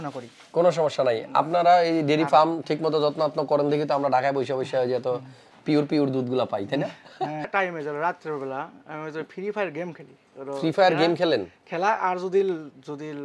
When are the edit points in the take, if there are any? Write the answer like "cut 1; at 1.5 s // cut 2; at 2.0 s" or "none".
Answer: cut 1; at 7.5 s